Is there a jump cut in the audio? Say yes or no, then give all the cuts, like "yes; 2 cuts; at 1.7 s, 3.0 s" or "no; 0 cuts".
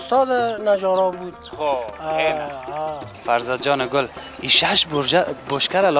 yes; 1 cut; at 3.1 s